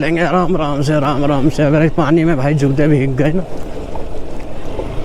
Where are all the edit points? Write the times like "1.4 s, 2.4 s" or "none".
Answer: none